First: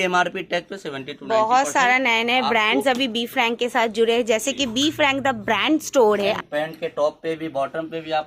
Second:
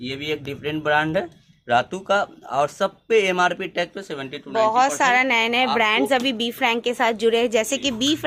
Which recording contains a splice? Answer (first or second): first